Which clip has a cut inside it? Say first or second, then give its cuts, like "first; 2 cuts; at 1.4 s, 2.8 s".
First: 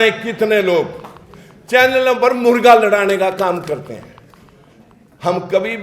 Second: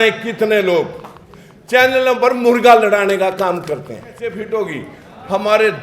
second; 1 cut; at 4.3 s